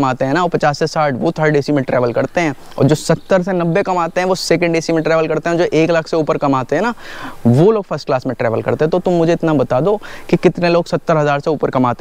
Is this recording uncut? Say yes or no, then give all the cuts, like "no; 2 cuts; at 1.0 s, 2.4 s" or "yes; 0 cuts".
yes; 0 cuts